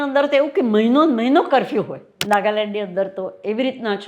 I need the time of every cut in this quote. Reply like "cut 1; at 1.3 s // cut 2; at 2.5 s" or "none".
cut 1; at 2.1 s